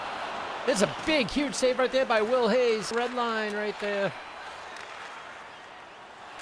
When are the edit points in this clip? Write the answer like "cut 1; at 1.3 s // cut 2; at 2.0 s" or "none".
cut 1; at 2.9 s